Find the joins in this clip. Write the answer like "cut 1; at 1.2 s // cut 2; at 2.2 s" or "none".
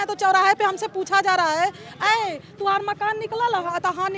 none